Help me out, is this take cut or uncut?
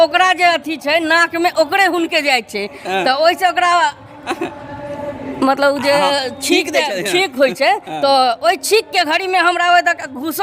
uncut